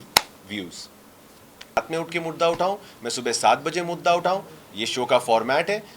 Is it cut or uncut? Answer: cut